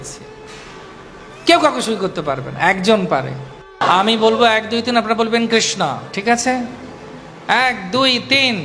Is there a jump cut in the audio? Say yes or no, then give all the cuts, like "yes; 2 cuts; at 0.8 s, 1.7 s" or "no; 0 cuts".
yes; 1 cut; at 3.8 s